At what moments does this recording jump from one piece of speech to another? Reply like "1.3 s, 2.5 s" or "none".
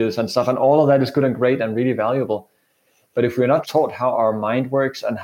3.7 s